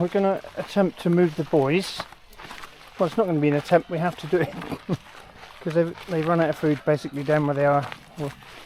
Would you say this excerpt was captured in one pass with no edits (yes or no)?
yes